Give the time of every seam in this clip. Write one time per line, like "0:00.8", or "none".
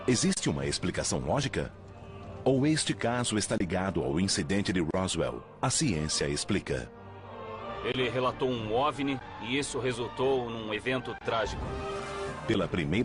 0:01.8